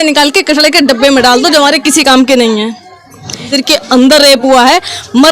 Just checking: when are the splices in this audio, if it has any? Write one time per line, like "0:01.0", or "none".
0:03.5